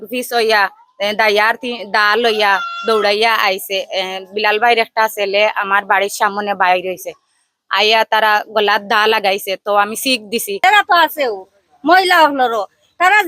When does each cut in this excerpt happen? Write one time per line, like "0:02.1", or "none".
0:10.6